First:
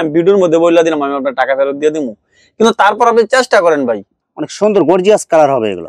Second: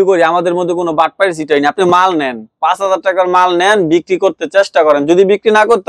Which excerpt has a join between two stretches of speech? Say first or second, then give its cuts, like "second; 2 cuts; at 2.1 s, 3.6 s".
first; 1 cut; at 4.1 s